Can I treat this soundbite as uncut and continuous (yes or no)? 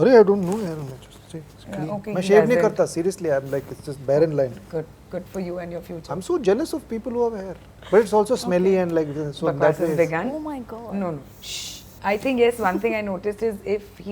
yes